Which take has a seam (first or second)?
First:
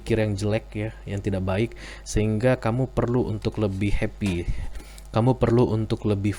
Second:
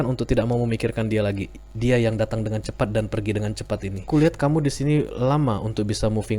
second